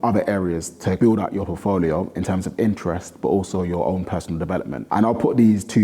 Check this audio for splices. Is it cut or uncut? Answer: cut